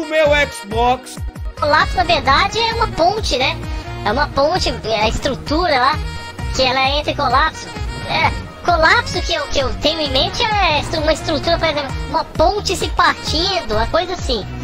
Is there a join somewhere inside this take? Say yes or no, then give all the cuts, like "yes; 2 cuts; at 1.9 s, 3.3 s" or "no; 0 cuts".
yes; 1 cut; at 1.0 s